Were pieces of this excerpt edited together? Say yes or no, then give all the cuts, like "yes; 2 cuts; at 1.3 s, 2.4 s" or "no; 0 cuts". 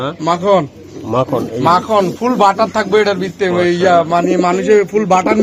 no; 0 cuts